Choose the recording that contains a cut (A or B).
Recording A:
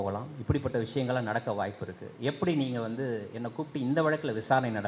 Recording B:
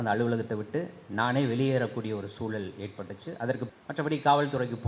B